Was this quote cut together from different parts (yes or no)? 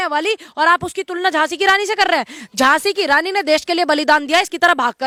no